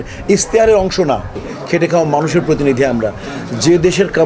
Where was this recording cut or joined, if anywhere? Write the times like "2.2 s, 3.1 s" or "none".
1.4 s